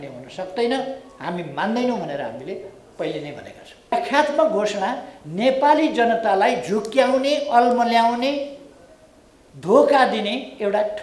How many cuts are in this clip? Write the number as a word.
one